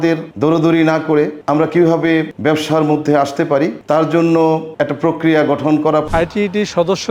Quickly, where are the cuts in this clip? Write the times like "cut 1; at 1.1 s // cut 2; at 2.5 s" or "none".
cut 1; at 6.1 s